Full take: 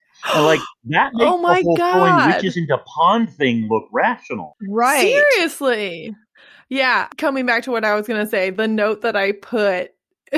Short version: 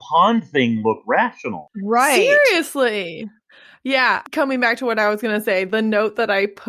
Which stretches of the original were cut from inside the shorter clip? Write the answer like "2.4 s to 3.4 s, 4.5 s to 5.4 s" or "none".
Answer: none